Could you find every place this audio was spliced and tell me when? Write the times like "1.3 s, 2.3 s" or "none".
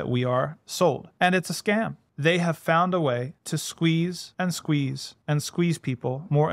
1.1 s, 2.0 s, 3.4 s, 4.2 s, 5.1 s